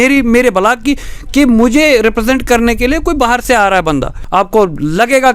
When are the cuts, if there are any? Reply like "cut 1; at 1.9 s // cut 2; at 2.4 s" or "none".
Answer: cut 1; at 4.2 s